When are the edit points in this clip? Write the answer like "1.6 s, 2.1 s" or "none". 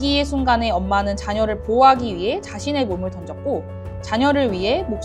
none

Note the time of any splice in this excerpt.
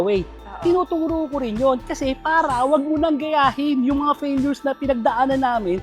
none

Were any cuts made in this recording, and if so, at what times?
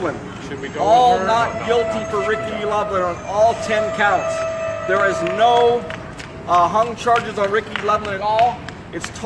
5.0 s

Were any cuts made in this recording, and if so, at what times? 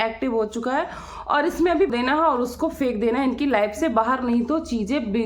1.9 s

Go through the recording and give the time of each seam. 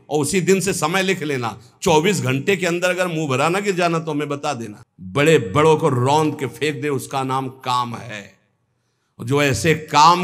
4.7 s

